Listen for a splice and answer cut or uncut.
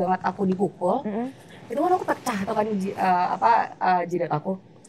uncut